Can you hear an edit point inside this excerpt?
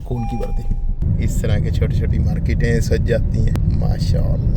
yes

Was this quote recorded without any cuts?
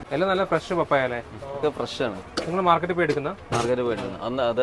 yes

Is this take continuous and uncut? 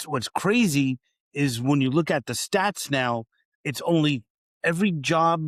yes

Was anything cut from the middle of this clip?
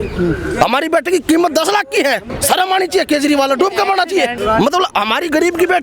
yes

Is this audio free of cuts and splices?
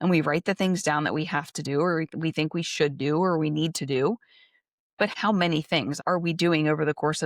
no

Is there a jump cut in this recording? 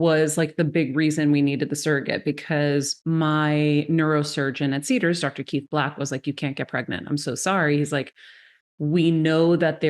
yes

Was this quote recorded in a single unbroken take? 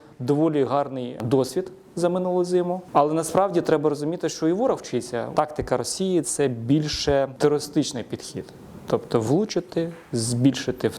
no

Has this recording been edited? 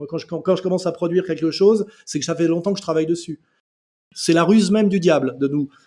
yes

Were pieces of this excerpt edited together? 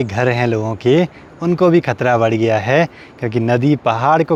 no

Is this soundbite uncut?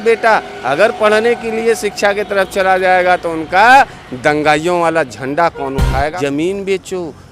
no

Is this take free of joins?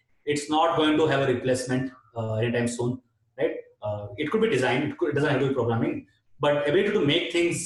yes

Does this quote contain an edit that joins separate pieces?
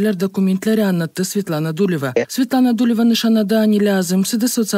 yes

